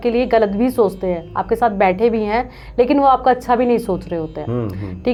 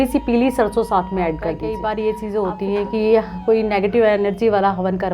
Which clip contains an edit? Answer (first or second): second